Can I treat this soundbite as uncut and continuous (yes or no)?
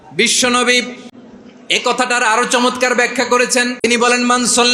no